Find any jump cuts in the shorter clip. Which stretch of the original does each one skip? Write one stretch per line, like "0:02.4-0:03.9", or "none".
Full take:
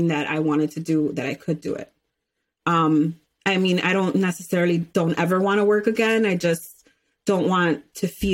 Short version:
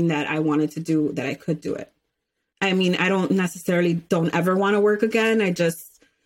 0:02.4-0:03.3